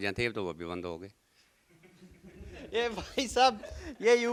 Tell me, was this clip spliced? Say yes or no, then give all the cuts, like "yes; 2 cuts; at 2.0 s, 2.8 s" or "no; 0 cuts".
no; 0 cuts